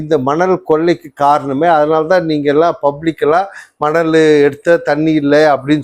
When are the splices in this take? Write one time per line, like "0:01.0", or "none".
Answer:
none